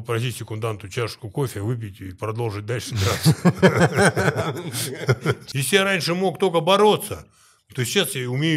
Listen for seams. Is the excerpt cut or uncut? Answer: cut